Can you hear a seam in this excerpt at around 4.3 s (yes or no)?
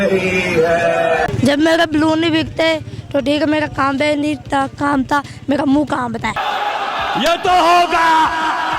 no